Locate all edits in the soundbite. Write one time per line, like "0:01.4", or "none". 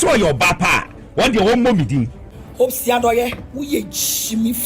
0:02.2